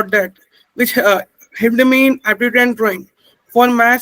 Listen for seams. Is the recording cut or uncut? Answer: uncut